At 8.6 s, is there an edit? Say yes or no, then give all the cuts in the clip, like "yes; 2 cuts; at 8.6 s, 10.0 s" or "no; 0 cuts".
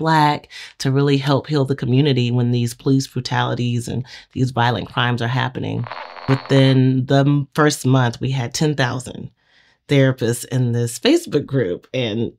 no; 1 cut; at 6.2 s